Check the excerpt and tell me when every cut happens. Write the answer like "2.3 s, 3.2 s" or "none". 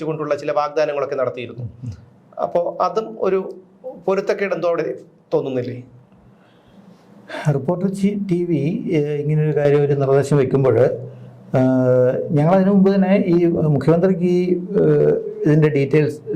none